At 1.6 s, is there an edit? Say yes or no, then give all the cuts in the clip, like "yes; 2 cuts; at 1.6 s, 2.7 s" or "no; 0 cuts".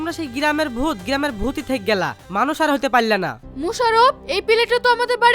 no; 1 cut; at 3.3 s